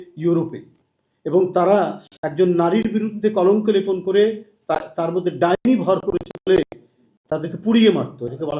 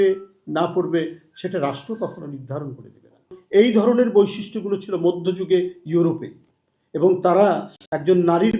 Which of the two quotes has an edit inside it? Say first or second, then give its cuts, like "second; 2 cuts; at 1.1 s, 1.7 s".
second; 1 cut; at 3.4 s